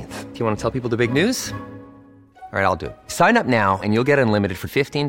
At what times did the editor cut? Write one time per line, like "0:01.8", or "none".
none